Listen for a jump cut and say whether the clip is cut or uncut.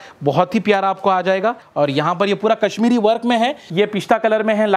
cut